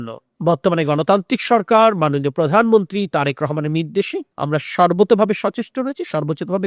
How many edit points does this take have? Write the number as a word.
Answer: zero